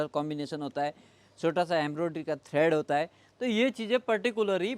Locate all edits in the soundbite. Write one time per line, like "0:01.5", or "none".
none

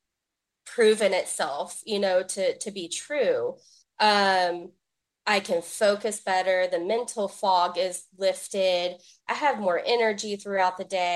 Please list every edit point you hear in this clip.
none

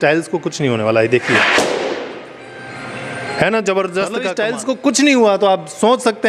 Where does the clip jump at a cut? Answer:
0:04.3

